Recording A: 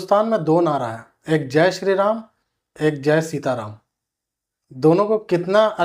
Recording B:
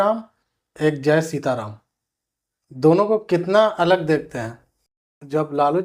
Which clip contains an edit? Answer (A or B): B